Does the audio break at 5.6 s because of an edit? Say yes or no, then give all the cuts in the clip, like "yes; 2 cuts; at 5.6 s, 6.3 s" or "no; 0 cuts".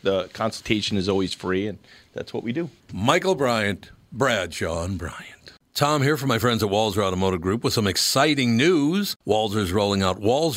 yes; 1 cut; at 5.6 s